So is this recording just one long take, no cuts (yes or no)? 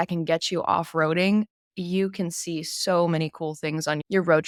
yes